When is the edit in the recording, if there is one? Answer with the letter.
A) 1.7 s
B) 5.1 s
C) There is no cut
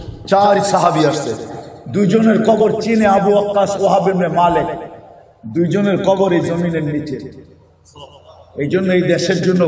C